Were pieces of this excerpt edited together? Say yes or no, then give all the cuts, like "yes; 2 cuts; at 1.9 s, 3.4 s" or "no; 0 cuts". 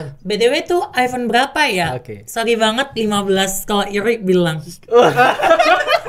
no; 0 cuts